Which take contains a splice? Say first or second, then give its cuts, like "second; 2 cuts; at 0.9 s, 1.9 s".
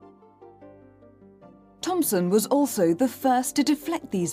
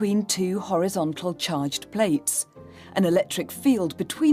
first; 1 cut; at 2.1 s